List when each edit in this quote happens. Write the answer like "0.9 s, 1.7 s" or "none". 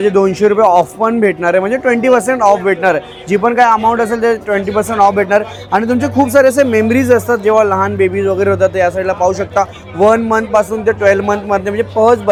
none